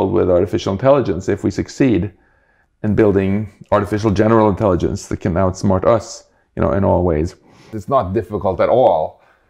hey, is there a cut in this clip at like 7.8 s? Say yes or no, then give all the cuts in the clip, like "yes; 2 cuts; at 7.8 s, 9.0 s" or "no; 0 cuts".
yes; 1 cut; at 7.8 s